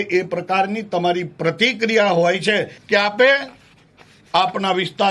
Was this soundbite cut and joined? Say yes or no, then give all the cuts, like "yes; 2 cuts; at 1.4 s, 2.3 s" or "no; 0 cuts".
yes; 1 cut; at 2.8 s